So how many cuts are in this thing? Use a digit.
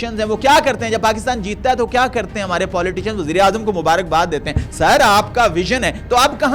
0